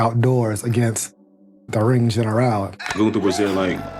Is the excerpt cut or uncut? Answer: cut